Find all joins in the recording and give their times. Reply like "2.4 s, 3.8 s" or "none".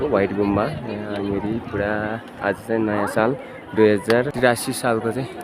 4.3 s